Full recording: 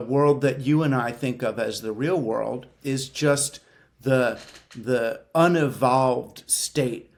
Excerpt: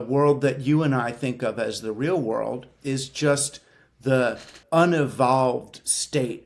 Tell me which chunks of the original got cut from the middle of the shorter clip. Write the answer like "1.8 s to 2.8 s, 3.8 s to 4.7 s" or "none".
4.6 s to 5.2 s